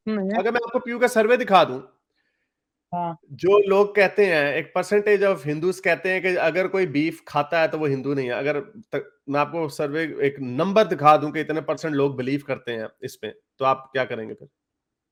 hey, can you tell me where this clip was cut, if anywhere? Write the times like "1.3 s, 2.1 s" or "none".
none